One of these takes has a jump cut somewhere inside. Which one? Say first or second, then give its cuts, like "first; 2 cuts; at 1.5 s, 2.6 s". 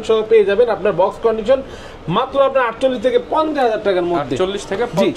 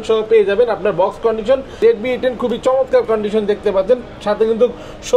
second; 1 cut; at 1.8 s